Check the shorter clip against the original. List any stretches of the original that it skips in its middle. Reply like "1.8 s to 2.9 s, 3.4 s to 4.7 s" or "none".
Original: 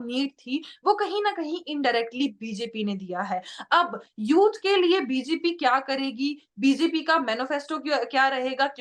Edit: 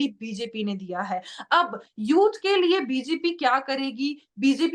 none